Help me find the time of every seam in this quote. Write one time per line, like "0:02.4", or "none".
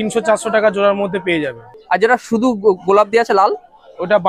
0:01.8